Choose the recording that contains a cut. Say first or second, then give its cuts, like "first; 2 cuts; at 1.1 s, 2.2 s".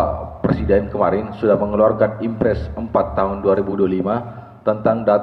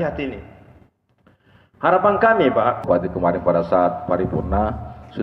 second; 1 cut; at 2.8 s